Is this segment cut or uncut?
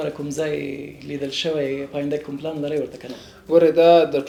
uncut